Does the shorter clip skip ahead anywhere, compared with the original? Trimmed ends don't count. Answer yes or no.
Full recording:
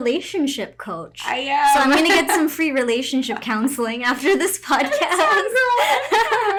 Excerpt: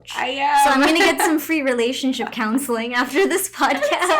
no